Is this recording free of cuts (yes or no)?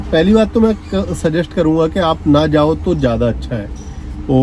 yes